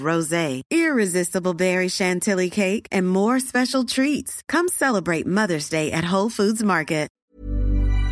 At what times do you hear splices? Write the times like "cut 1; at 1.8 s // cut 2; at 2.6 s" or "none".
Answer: cut 1; at 7.1 s